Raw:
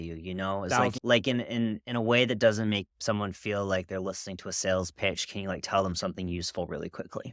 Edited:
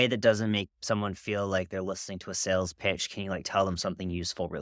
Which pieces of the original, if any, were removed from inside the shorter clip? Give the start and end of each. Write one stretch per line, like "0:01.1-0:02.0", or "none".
none